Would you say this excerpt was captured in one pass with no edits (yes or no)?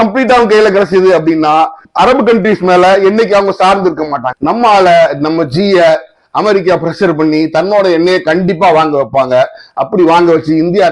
no